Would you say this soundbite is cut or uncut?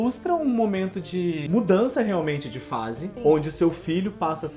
cut